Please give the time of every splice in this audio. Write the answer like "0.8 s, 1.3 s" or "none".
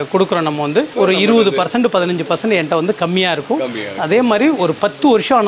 0.9 s